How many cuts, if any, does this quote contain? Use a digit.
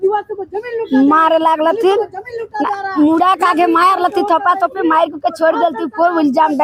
0